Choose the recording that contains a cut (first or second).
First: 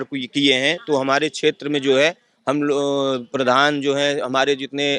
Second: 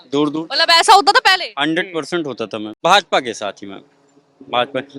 second